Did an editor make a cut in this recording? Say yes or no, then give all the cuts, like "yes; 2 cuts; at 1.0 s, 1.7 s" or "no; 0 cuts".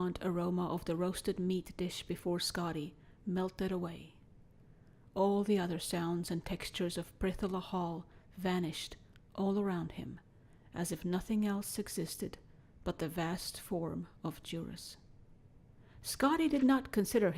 yes; 1 cut; at 8.5 s